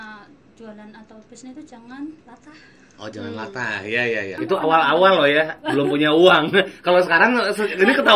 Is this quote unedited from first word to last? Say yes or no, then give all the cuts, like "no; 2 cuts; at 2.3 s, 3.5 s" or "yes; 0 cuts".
no; 1 cut; at 4.4 s